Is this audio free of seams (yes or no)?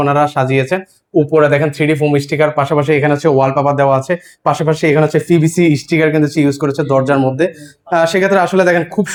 yes